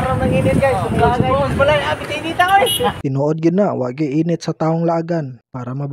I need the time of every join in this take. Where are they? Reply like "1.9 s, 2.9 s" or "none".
3.0 s